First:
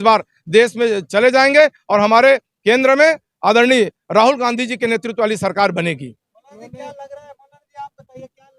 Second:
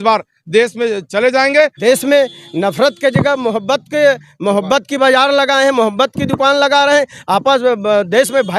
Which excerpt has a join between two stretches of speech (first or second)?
second